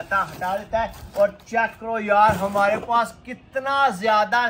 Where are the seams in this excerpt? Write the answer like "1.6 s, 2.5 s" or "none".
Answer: none